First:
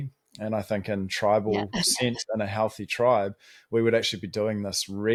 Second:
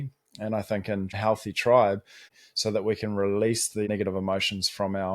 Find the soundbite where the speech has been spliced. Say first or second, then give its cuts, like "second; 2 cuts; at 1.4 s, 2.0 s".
second; 3 cuts; at 1.2 s, 2.2 s, 3.9 s